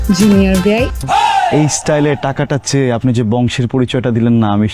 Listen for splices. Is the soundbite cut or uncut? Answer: cut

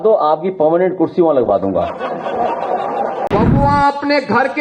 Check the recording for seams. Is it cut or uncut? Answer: cut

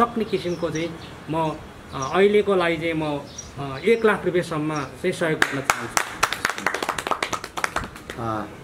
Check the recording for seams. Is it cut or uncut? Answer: uncut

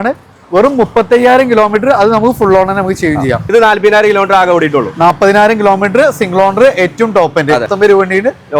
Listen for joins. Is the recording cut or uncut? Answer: cut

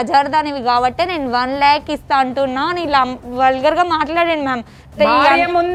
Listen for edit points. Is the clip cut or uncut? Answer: uncut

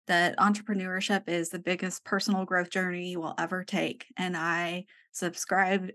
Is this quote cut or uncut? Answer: uncut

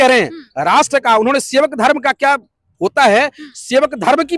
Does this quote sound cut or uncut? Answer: uncut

